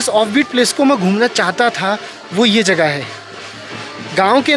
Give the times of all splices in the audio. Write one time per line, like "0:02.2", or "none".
none